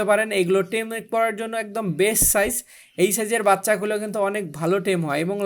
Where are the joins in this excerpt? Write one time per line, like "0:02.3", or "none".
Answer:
none